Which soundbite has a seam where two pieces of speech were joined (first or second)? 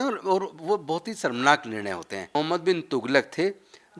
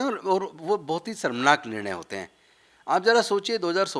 first